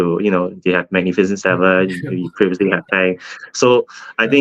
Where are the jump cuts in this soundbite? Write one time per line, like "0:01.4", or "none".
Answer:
none